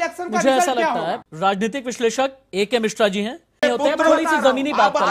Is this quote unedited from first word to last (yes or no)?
no